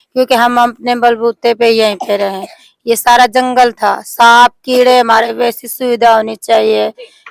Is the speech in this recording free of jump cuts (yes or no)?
no